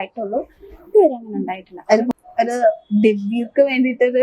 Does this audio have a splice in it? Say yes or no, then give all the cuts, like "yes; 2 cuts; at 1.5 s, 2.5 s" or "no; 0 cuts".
yes; 1 cut; at 2.1 s